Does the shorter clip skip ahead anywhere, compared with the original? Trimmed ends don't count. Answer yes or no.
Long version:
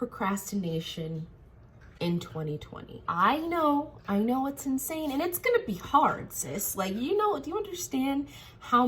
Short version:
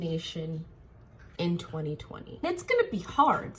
yes